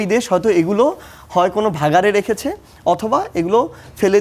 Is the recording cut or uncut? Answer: uncut